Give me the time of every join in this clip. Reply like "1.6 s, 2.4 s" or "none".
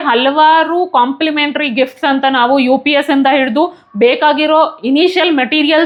none